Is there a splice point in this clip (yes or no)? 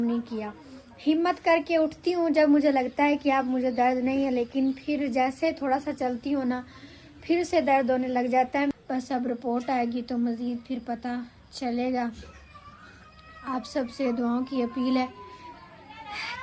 yes